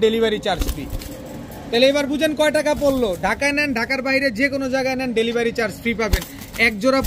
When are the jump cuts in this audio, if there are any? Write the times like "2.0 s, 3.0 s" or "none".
none